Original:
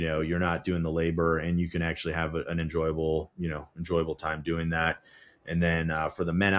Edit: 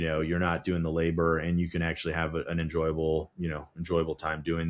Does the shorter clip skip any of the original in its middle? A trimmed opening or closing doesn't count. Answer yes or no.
no